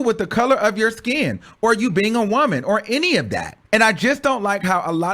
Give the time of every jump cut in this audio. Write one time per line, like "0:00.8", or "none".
0:03.5